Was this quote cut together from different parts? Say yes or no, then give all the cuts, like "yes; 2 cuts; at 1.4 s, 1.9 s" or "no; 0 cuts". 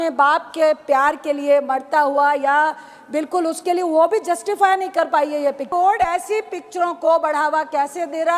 yes; 1 cut; at 5.7 s